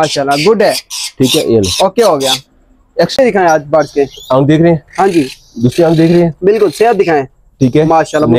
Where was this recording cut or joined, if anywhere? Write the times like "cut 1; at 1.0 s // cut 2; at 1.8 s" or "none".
cut 1; at 3.1 s